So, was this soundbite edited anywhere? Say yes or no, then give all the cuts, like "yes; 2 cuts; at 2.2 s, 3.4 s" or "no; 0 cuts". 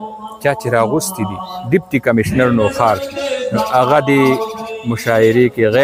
no; 0 cuts